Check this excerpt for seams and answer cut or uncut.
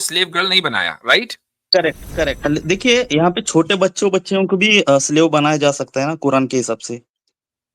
cut